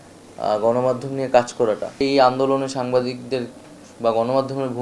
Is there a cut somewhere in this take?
yes; 1 cut; at 2.0 s

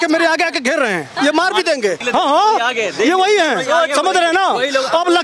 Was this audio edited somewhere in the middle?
no; 0 cuts

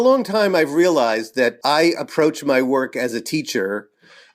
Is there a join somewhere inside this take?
yes; 1 cut; at 1.6 s

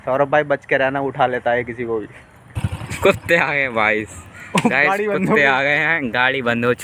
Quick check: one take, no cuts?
no; 1 cut; at 2.5 s

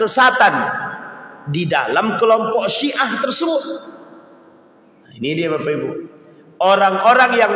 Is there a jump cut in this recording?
no; 0 cuts

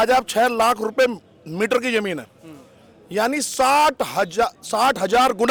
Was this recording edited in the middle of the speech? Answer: no; 0 cuts

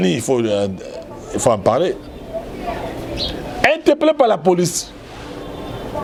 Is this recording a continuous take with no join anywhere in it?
yes; 0 cuts

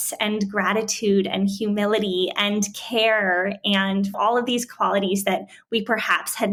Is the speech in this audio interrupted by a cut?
no; 0 cuts

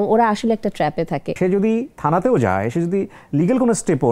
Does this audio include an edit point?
yes; 1 cut; at 1.4 s

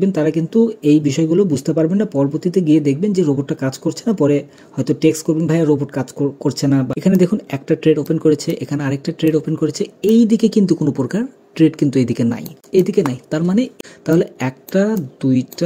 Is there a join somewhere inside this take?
yes; 3 cuts; at 6.9 s, 12.5 s, 13.7 s

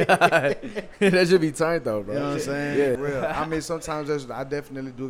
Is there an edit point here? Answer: yes; 1 cut; at 3.0 s

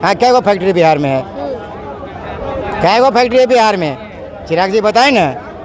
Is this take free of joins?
yes; 0 cuts

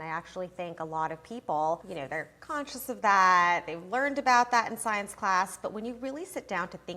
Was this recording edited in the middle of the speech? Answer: yes; 1 cut; at 1.9 s

